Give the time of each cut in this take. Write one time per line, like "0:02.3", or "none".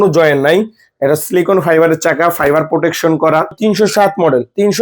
0:03.6